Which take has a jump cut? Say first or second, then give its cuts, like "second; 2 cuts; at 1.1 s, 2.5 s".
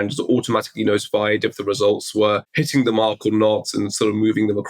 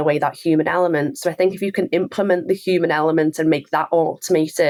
first; 1 cut; at 2.5 s